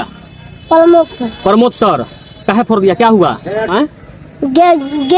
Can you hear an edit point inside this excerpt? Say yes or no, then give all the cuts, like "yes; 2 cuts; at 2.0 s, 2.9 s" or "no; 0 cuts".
yes; 1 cut; at 3.7 s